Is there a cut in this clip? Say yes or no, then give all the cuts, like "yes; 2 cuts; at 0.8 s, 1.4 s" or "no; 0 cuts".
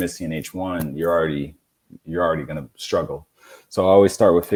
no; 0 cuts